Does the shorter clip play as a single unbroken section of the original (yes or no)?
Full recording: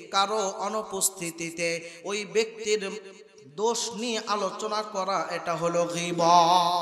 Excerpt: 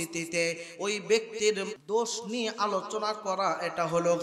no